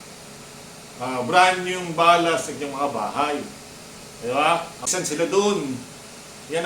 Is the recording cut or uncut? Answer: cut